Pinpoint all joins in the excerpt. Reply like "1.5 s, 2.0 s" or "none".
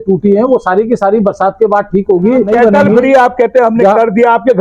2.5 s